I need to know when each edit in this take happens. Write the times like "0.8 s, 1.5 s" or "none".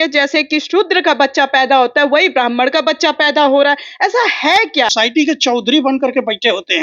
4.9 s